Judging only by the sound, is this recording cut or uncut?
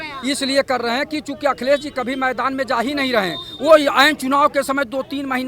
uncut